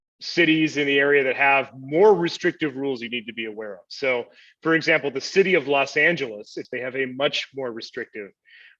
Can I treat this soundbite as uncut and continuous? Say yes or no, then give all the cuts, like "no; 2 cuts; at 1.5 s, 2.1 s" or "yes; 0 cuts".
no; 1 cut; at 6.7 s